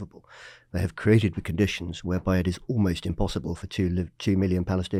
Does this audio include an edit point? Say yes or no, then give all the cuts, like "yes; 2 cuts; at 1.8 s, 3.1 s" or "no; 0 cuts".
no; 0 cuts